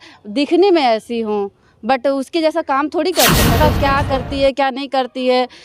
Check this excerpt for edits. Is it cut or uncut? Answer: cut